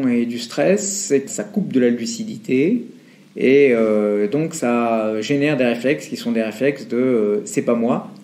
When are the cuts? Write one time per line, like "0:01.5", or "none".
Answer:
0:01.3